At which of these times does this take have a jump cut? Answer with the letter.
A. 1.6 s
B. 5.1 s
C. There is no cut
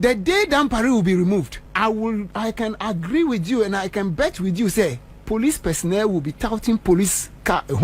A